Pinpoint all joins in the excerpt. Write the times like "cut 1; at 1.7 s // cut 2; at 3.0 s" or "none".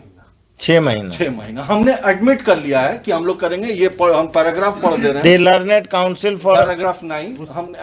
none